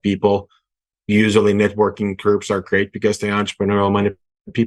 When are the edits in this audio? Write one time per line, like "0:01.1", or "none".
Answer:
0:00.9